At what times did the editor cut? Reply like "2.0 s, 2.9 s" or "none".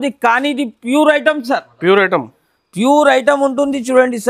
none